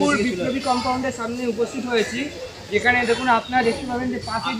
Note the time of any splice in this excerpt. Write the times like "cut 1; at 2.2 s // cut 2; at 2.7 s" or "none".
none